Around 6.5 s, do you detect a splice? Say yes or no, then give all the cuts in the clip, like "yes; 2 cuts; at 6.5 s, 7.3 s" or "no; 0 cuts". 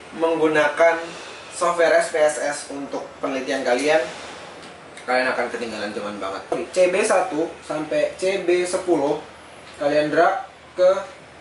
yes; 1 cut; at 6.5 s